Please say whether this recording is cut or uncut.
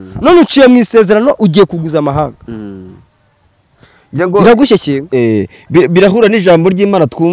uncut